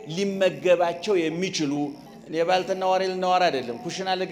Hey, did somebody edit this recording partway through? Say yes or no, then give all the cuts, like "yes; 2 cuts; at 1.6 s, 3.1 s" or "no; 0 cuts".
yes; 1 cut; at 2.2 s